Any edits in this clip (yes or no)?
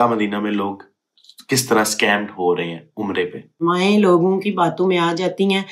yes